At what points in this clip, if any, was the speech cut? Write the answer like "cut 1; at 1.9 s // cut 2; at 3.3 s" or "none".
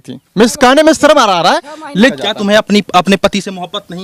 cut 1; at 2.1 s